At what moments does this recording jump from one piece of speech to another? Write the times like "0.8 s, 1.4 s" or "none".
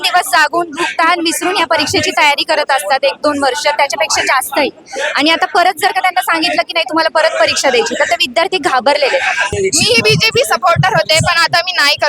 9.5 s